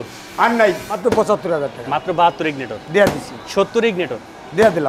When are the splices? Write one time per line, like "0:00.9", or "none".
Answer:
0:01.0